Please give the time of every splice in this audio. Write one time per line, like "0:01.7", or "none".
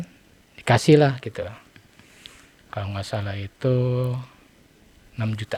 none